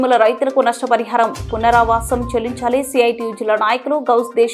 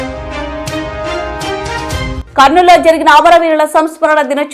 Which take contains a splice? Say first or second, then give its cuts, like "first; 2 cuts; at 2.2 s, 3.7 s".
second; 1 cut; at 2.1 s